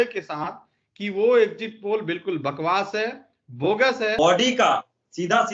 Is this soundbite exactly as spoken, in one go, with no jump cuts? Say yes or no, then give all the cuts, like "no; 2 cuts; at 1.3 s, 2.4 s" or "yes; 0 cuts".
no; 1 cut; at 4.1 s